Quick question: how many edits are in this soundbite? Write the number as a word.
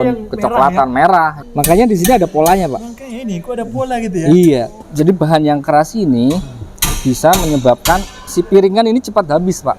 two